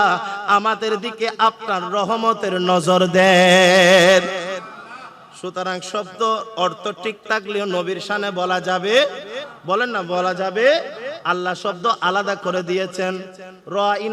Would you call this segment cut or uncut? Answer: uncut